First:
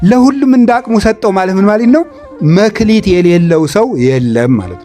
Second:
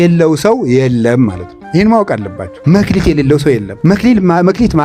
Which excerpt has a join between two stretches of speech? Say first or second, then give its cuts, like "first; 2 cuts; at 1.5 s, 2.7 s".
second; 2 cuts; at 2.5 s, 3.7 s